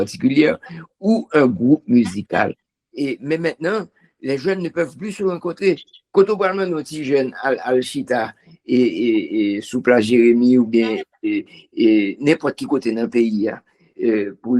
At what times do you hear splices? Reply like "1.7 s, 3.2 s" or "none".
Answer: 2.6 s